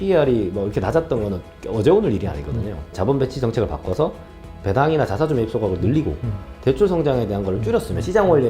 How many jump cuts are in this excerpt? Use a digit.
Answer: 1